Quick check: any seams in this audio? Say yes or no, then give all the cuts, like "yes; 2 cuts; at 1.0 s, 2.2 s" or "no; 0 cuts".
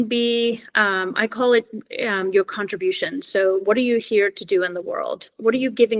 no; 0 cuts